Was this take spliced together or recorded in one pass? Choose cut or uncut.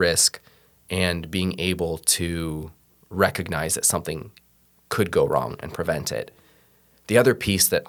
uncut